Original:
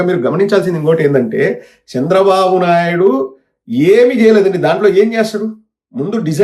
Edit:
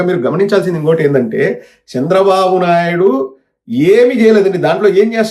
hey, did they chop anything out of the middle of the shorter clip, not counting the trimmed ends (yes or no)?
no